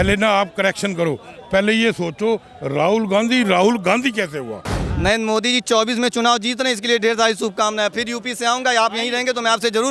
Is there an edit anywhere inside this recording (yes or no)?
yes